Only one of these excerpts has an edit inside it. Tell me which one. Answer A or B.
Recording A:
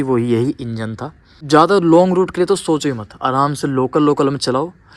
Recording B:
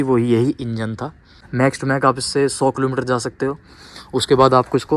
B